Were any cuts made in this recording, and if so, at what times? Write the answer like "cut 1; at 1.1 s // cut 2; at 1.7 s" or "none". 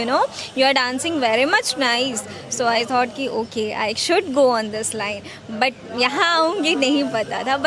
none